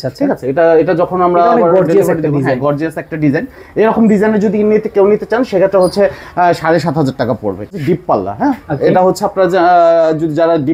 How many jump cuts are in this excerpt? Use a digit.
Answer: 1